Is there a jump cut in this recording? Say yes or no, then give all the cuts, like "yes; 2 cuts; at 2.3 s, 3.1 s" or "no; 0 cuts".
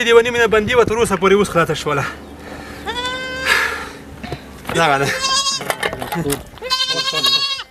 no; 0 cuts